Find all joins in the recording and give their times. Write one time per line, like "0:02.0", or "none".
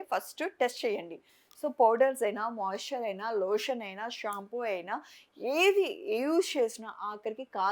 none